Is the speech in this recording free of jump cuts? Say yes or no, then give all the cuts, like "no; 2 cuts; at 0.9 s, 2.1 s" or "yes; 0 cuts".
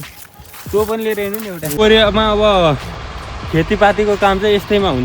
no; 1 cut; at 1.8 s